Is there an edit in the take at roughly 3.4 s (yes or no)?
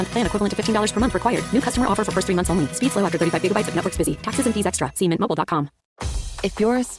no